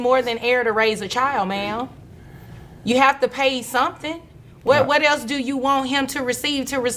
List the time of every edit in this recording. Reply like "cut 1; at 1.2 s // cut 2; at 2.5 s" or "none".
none